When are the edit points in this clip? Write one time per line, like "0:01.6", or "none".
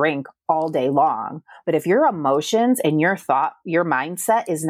0:01.6